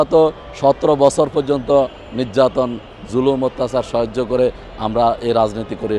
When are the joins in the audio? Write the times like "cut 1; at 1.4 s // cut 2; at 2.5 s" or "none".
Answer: none

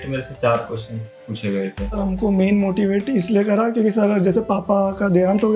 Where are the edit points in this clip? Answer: cut 1; at 1.9 s

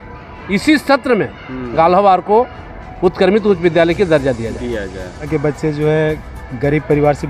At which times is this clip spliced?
cut 1; at 5.3 s

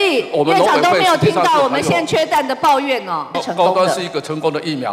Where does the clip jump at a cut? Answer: cut 1; at 3.3 s

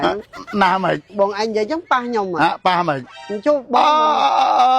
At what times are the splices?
cut 1; at 1.1 s

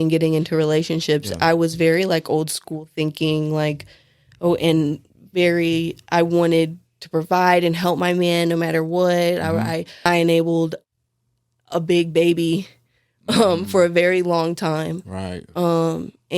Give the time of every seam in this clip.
cut 1; at 10.1 s

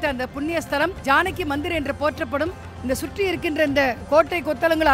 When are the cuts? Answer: cut 1; at 1.0 s // cut 2; at 4.0 s

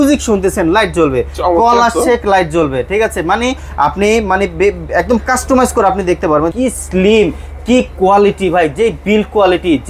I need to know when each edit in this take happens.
cut 1; at 6.5 s

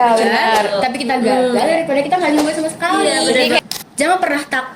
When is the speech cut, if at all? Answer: cut 1; at 3.6 s

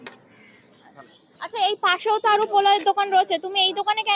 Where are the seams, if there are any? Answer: none

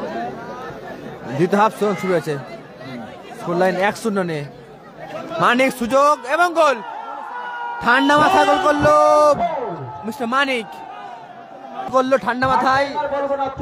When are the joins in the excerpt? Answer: cut 1; at 11.9 s

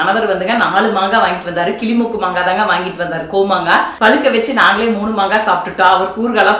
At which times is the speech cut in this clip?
cut 1; at 3.9 s

